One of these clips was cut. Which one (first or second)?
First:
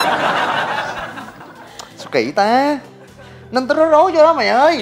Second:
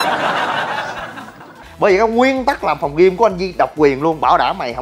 second